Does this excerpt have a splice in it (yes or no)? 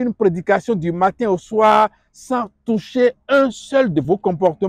no